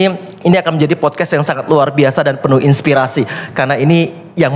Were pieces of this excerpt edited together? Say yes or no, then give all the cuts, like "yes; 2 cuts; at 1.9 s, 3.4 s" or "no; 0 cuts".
no; 0 cuts